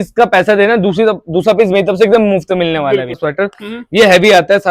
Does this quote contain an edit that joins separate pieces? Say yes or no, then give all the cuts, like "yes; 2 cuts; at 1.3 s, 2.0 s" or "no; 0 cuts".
yes; 1 cut; at 3.2 s